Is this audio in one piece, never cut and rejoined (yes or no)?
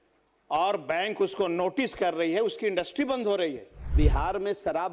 no